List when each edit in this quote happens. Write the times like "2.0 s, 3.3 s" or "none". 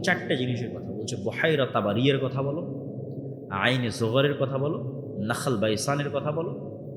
none